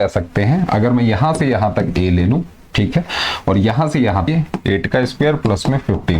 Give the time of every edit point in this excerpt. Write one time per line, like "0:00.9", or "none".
0:04.3